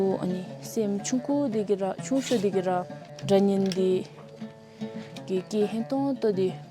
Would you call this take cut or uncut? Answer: uncut